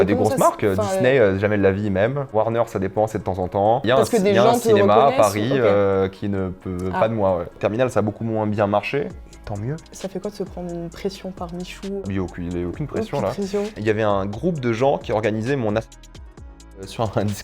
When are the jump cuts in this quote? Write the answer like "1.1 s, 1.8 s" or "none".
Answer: 3.8 s, 7.6 s, 9.9 s, 12.0 s, 13.7 s